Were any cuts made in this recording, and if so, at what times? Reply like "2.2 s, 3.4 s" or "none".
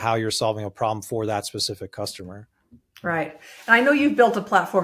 none